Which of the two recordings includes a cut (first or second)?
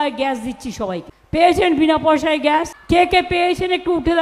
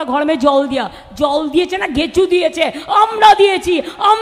first